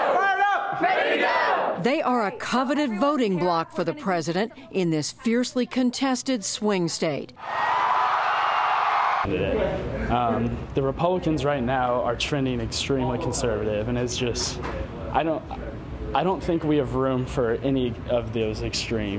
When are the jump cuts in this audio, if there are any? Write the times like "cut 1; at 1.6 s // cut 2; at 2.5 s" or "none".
none